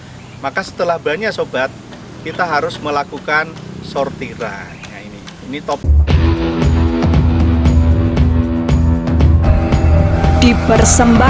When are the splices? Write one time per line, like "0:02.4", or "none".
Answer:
0:05.8